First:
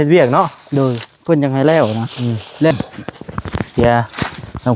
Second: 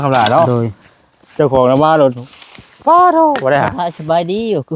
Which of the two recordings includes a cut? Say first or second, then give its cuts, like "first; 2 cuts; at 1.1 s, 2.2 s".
first; 1 cut; at 2.7 s